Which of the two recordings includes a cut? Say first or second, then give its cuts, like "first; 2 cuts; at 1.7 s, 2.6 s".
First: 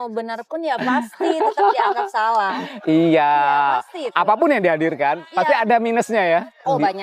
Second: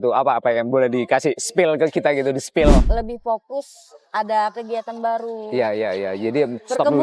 second; 1 cut; at 2.9 s